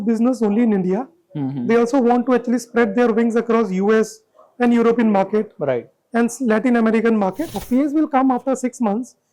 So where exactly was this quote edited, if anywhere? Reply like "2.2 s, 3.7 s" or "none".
7.5 s